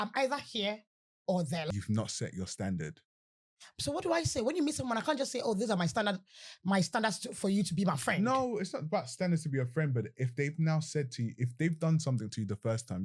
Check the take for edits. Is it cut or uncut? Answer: cut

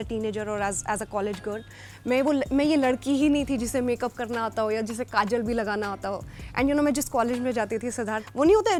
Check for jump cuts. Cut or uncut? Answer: uncut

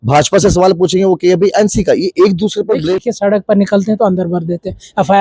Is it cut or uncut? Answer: cut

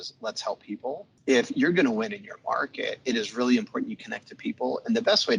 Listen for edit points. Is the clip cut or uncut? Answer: cut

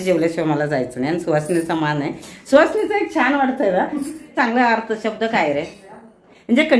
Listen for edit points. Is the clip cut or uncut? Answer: cut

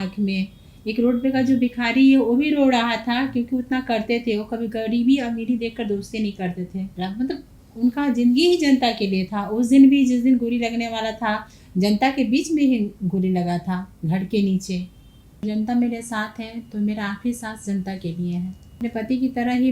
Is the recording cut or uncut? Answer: cut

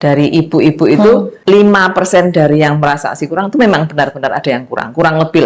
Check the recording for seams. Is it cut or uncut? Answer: cut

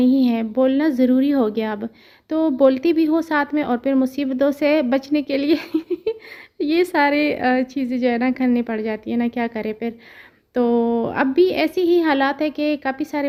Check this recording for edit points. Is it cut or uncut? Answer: uncut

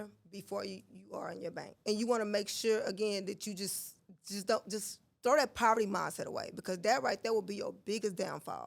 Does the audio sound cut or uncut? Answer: cut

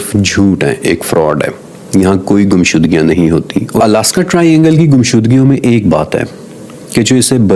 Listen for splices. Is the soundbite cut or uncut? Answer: cut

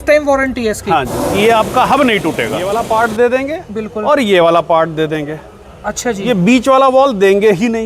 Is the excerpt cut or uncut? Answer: cut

